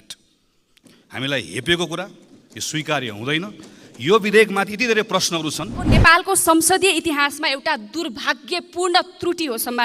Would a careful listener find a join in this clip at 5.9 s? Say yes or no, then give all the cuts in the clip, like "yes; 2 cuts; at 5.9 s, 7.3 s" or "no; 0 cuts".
yes; 1 cut; at 5.9 s